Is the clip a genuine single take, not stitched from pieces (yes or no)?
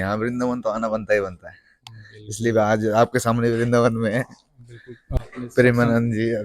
no